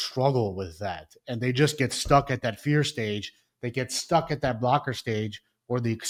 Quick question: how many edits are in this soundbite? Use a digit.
0